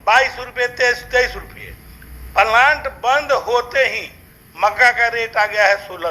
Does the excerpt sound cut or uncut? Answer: uncut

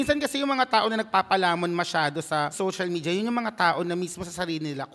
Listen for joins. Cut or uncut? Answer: cut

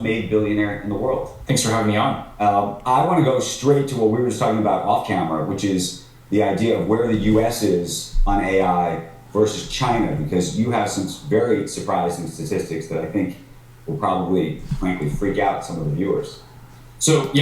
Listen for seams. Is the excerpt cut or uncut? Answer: cut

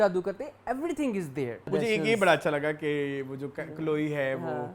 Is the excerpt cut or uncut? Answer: cut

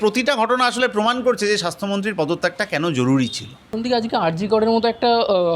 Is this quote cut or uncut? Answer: cut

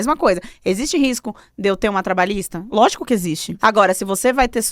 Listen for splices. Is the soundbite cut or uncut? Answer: cut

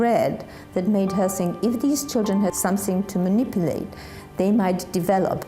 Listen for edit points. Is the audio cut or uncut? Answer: cut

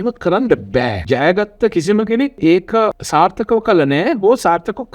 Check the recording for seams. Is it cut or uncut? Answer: cut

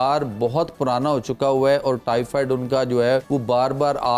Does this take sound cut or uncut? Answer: cut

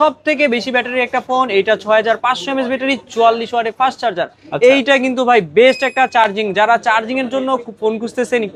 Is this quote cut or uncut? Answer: uncut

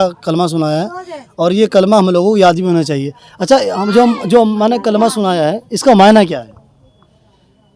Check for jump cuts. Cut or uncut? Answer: uncut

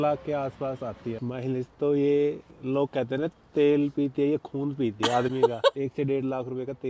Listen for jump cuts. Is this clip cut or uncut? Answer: cut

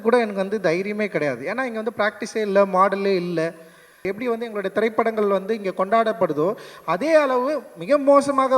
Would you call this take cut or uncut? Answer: cut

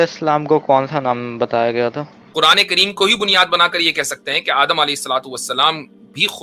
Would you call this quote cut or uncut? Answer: cut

